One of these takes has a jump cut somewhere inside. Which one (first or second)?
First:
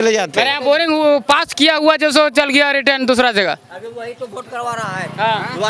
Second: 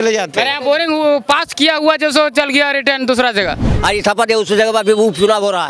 second